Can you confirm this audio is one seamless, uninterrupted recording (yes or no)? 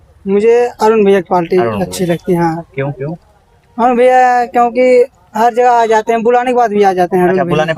yes